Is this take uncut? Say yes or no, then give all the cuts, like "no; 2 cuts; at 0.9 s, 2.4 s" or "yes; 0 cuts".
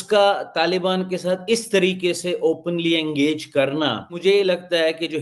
no; 1 cut; at 4.2 s